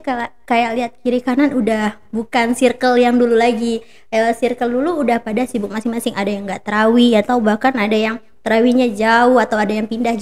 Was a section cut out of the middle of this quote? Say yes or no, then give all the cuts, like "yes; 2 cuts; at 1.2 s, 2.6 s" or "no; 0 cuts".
no; 0 cuts